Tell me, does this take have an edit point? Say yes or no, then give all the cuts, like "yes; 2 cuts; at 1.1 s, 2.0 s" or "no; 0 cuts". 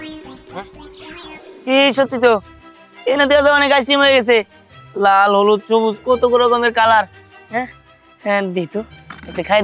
no; 0 cuts